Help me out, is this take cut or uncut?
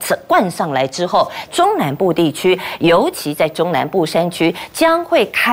cut